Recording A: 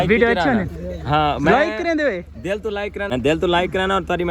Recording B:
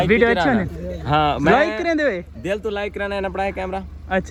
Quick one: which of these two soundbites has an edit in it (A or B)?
A